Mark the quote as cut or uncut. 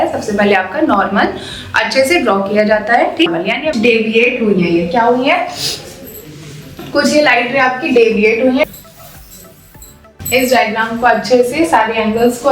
cut